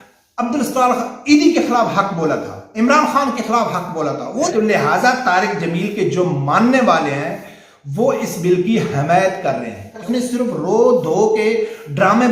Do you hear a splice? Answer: yes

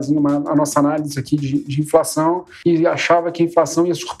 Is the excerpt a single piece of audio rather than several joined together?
no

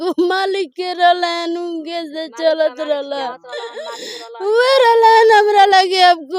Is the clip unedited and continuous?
yes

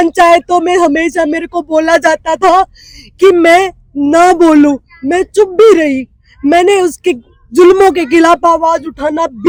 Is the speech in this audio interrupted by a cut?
no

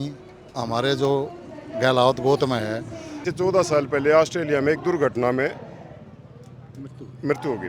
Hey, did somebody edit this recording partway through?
yes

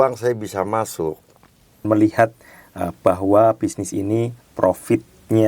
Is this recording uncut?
no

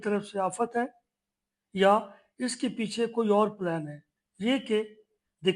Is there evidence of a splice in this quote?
no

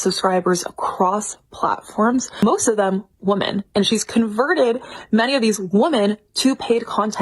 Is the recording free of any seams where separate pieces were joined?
yes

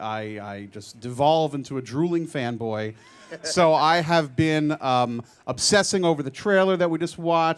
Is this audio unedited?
yes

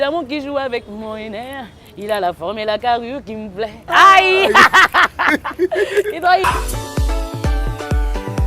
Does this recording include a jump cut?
yes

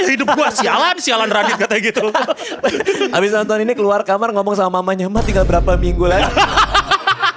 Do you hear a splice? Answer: no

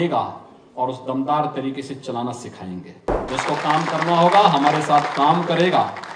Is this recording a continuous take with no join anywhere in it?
no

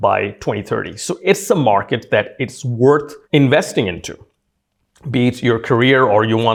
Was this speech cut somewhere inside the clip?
no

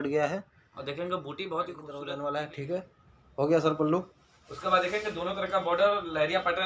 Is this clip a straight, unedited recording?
no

